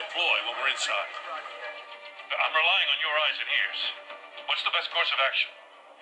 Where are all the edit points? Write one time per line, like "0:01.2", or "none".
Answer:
none